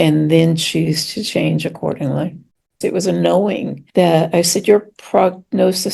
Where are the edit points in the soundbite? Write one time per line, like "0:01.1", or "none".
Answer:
0:02.4